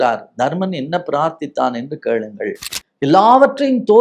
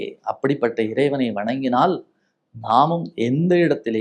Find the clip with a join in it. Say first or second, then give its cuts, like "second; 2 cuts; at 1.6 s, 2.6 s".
first; 1 cut; at 2.6 s